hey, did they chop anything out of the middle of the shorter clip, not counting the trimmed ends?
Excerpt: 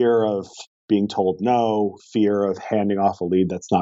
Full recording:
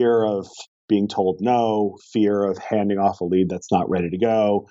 no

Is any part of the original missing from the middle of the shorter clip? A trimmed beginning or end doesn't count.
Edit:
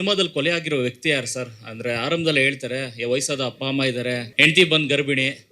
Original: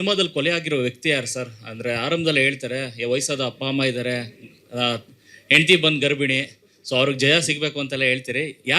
yes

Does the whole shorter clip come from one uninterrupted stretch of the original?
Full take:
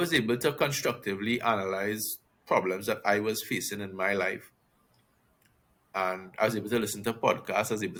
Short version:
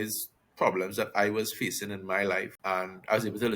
no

